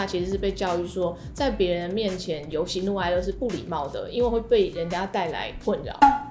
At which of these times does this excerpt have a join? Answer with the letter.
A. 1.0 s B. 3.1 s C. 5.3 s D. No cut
D